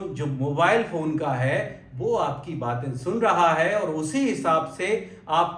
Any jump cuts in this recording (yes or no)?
no